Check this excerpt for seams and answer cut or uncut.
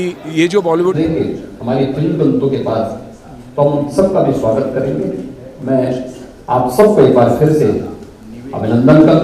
cut